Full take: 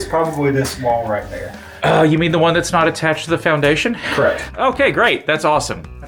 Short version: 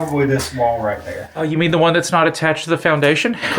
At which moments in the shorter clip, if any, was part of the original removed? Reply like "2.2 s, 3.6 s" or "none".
1.4 s